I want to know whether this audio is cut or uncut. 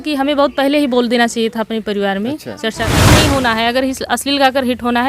cut